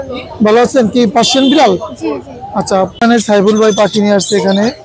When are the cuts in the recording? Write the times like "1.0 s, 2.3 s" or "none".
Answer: 2.9 s